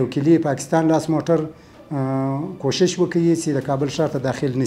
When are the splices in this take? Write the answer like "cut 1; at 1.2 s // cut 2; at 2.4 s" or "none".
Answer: none